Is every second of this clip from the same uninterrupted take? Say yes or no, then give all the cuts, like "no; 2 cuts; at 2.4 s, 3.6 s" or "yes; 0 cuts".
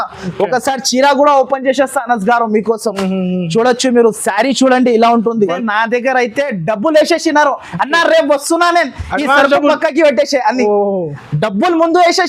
no; 1 cut; at 5.5 s